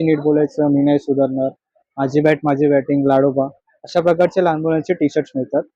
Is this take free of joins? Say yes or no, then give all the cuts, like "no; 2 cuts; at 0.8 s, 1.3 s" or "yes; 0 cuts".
yes; 0 cuts